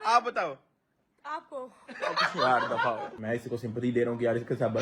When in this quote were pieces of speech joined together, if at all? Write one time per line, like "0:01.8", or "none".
0:03.1

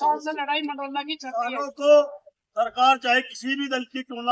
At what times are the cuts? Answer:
0:01.6

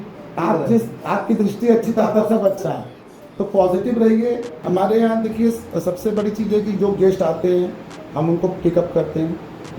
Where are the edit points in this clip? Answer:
0:04.5

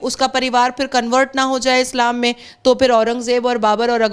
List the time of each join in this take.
none

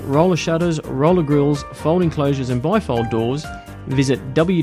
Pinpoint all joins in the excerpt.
none

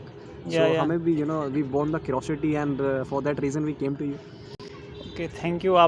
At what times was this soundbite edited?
none

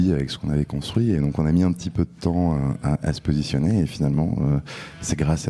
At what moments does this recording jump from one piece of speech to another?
none

